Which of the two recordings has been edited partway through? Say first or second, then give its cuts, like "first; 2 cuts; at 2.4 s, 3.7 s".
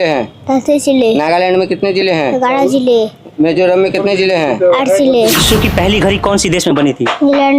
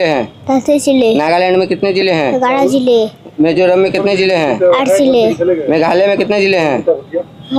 first; 1 cut; at 5.4 s